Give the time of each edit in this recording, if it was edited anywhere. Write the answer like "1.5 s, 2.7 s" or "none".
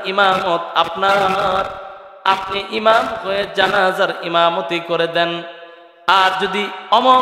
none